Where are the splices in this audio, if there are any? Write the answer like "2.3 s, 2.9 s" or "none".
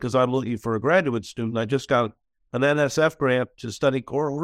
none